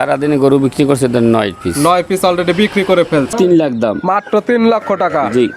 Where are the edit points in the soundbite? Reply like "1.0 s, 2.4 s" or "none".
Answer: 3.3 s